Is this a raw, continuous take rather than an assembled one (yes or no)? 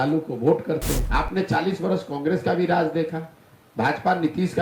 no